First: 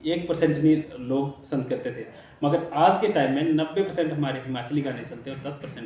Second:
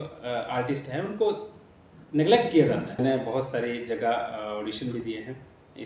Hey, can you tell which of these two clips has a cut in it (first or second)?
second